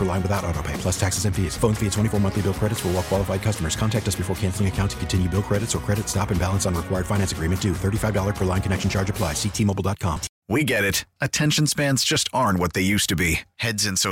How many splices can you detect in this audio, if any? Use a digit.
1